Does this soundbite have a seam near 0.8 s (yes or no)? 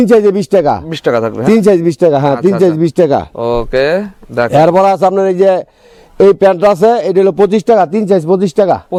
no